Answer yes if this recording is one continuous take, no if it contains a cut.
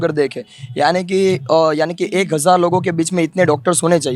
yes